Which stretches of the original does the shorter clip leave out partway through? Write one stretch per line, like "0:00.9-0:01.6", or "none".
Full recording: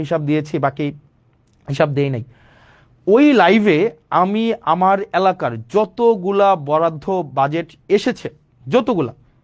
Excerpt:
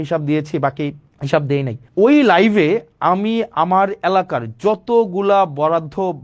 0:01.1-0:01.6
0:02.3-0:02.9